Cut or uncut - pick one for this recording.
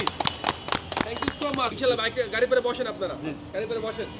cut